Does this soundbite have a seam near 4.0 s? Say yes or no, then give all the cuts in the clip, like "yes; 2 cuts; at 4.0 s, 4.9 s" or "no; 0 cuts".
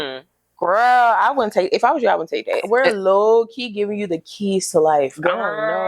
no; 1 cut; at 2.6 s